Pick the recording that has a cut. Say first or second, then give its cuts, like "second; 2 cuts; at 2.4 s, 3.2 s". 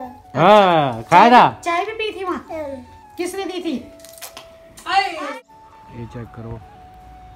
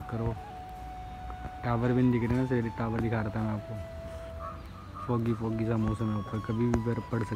first; 1 cut; at 5.3 s